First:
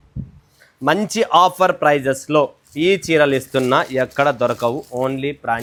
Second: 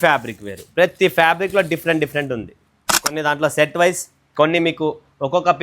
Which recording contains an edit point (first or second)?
second